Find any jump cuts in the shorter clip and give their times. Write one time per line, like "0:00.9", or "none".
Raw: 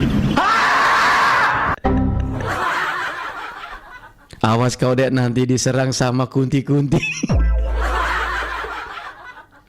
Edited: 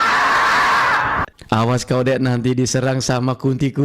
0:01.3

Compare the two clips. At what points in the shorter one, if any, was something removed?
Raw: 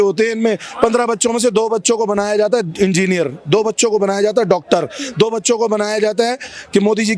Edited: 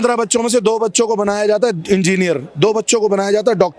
none

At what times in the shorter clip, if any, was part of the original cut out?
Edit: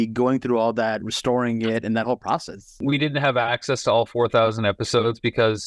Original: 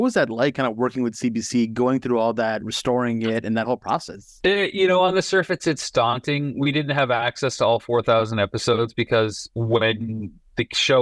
0:02.7

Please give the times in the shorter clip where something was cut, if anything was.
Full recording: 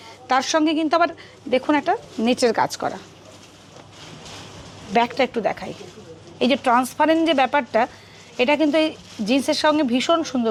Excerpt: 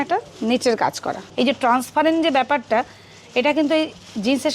0:01.2

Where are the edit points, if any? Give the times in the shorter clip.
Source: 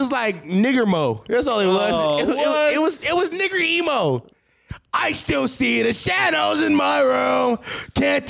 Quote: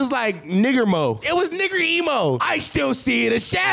0:01.2
0:02.4

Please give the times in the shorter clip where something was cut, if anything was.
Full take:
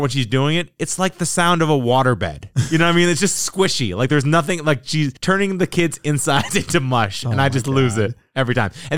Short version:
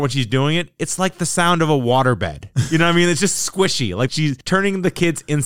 0:04.1

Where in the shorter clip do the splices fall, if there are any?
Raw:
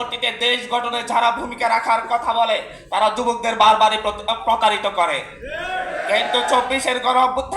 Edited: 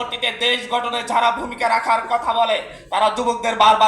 none

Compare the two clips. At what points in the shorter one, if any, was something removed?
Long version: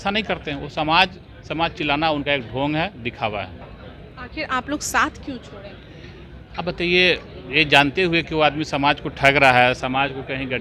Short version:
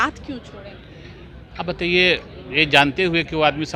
none

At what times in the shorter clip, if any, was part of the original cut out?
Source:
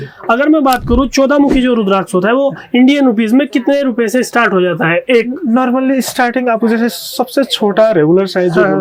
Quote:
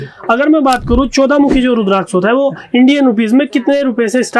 none

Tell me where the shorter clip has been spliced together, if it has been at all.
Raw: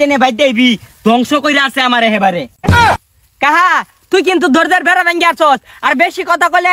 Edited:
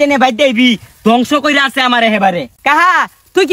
0:02.5

